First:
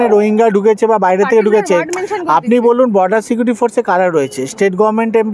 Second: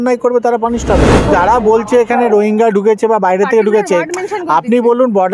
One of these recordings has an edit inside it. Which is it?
second; 1 cut; at 1.3 s

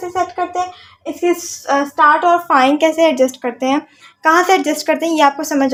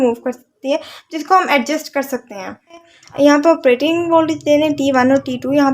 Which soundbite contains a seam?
second; 1 cut; at 3.0 s

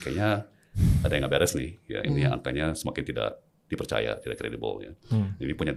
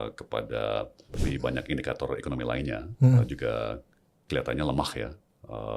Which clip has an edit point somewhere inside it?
second; 1 cut; at 1.1 s

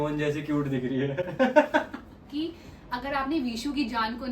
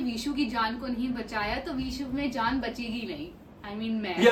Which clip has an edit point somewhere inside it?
first; 1 cut; at 2.3 s

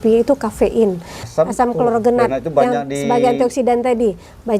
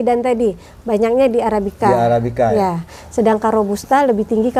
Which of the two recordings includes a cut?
first; 1 cut; at 1.2 s

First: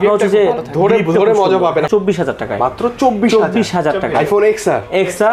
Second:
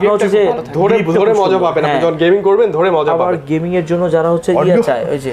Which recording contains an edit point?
first; 1 cut; at 1.9 s

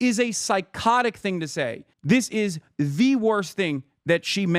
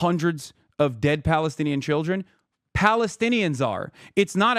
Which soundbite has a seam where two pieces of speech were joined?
first; 1 cut; at 1.9 s

